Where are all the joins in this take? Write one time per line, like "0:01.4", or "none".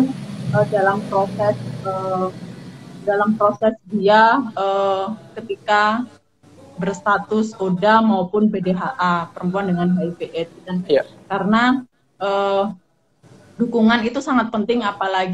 none